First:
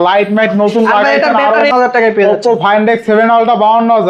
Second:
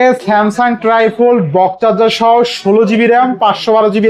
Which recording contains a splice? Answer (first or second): first